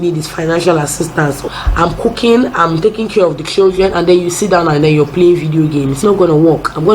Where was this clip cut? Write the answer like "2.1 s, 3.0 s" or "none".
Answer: 1.5 s, 5.9 s

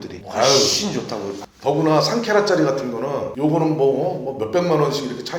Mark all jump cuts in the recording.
1.4 s

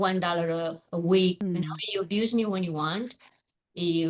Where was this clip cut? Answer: 1.4 s

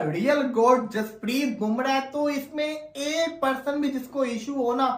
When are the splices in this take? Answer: none

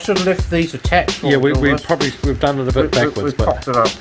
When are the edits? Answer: none

